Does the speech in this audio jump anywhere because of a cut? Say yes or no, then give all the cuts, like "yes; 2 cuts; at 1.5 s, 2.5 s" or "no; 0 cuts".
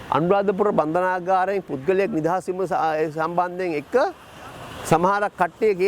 no; 0 cuts